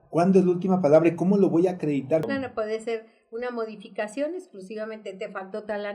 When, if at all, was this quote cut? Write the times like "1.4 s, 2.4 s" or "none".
2.3 s